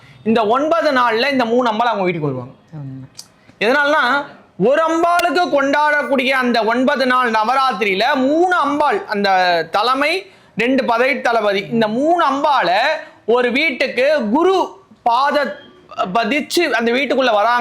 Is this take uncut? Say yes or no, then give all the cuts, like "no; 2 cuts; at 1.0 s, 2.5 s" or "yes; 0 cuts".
yes; 0 cuts